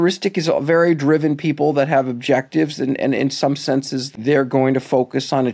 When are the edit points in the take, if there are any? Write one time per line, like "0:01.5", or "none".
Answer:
0:04.1